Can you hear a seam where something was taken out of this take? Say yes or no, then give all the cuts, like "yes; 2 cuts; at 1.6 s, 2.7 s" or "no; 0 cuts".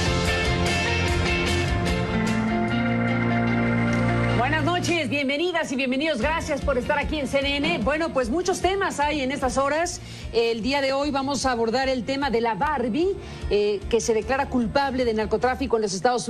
no; 0 cuts